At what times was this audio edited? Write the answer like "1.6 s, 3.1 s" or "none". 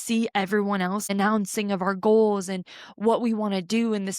1.1 s